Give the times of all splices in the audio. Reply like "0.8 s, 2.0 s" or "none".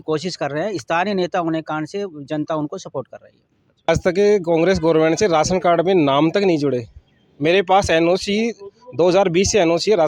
3.9 s